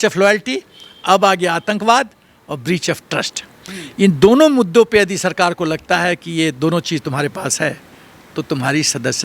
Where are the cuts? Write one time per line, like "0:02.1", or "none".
none